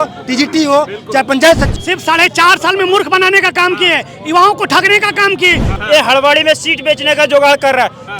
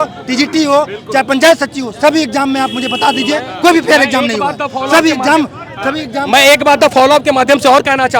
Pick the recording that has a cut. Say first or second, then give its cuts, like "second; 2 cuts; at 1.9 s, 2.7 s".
first; 2 cuts; at 1.7 s, 5.8 s